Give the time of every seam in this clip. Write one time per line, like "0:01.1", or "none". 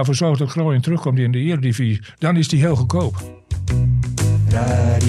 0:03.3